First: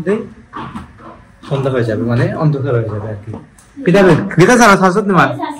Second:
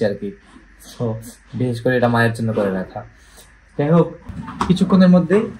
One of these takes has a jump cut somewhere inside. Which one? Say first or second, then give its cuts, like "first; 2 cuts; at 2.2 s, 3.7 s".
second; 1 cut; at 4.3 s